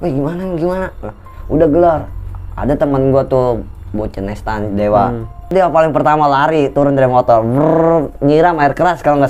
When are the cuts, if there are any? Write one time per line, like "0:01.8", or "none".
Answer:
0:05.5